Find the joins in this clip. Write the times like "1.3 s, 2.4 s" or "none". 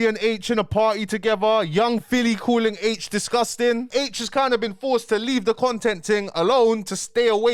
none